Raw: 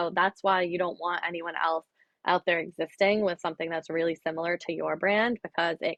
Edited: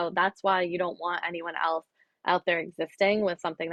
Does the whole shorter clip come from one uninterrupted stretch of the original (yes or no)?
yes